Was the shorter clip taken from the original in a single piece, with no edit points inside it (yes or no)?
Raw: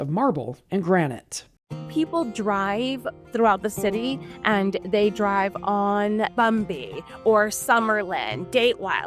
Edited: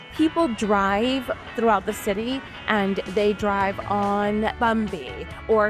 yes